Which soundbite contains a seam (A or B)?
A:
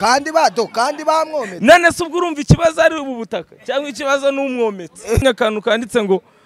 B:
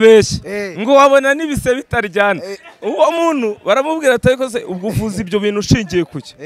A